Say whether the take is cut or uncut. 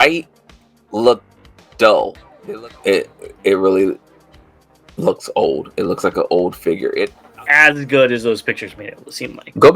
cut